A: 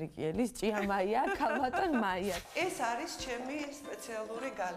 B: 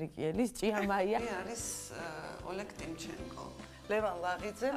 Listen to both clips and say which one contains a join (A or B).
A